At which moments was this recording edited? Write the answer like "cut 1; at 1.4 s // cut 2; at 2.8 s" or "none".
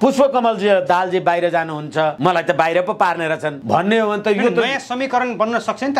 cut 1; at 2.2 s // cut 2; at 3.5 s